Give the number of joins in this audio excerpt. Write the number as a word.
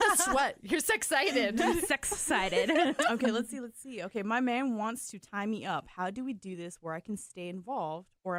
zero